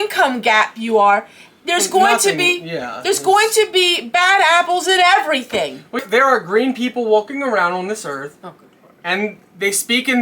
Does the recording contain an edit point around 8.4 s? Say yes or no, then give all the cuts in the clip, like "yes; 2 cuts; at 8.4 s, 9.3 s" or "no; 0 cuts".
no; 1 cut; at 6.0 s